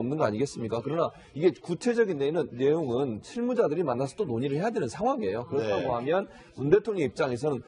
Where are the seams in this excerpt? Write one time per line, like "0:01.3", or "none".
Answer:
none

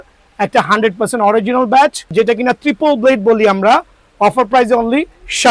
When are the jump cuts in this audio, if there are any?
0:02.1

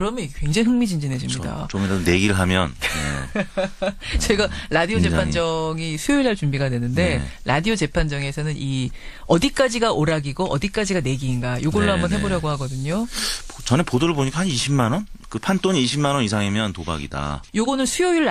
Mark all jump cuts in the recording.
0:08.8

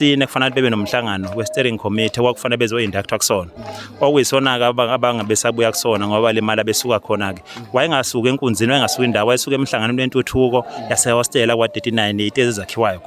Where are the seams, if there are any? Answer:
none

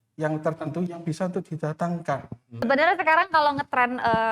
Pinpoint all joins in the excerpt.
0:02.7

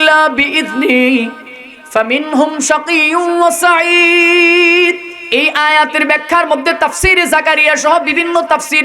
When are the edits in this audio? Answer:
0:05.1

